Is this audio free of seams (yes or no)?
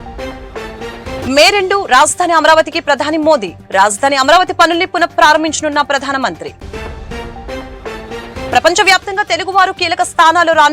no